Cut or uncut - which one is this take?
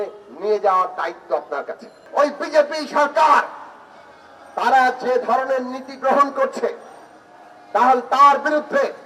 cut